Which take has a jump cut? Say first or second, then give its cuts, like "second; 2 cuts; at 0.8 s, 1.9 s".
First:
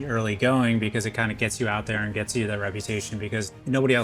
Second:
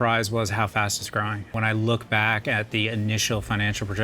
second; 1 cut; at 1.5 s